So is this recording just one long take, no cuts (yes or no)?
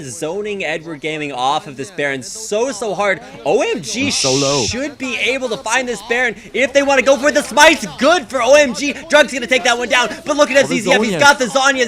yes